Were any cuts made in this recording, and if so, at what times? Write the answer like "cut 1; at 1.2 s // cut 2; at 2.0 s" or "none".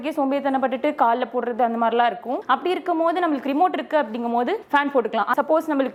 none

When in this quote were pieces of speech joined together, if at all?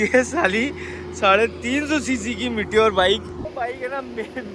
cut 1; at 3.5 s

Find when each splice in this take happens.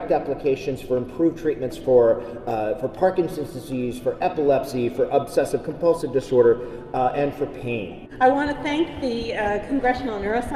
cut 1; at 8.0 s

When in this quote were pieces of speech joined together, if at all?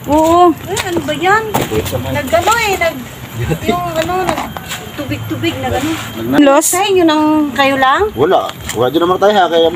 cut 1; at 6.4 s

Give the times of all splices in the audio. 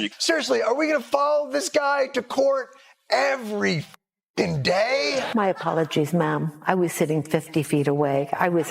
cut 1; at 5.3 s

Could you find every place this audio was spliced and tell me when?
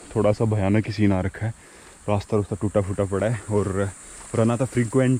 none

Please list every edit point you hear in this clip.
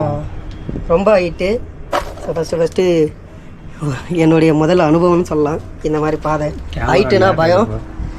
none

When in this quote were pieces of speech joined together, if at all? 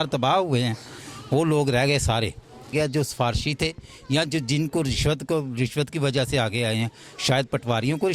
cut 1; at 2.7 s

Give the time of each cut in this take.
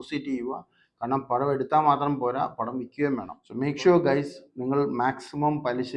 cut 1; at 3.4 s

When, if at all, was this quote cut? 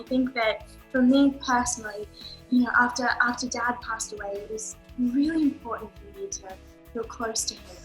none

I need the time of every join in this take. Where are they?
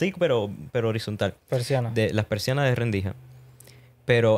none

